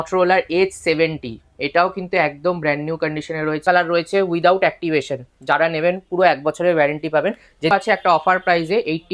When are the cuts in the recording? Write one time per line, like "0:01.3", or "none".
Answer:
0:03.6
0:07.7